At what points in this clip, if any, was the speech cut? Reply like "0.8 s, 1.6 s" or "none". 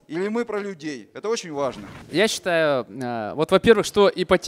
2.1 s